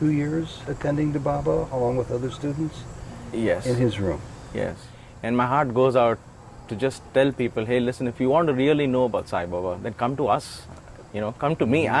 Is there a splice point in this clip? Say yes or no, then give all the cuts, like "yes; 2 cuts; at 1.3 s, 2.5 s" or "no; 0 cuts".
yes; 1 cut; at 4.9 s